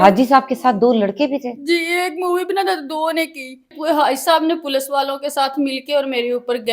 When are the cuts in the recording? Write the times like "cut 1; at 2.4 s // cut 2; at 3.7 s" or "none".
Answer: cut 1; at 3.7 s